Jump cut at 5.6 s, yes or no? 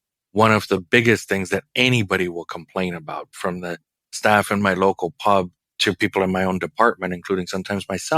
yes